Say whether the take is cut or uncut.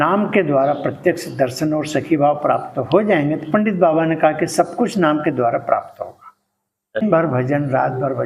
cut